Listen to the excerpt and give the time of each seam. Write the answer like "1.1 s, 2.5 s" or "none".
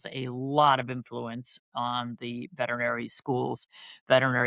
none